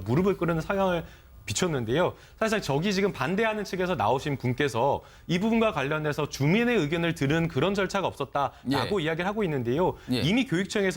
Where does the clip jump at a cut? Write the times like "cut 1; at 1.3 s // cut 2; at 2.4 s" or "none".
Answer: none